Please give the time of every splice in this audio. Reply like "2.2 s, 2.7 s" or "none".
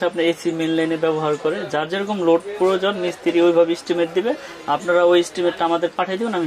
none